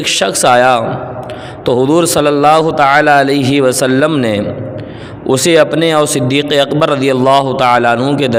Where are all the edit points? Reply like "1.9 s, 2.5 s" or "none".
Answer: none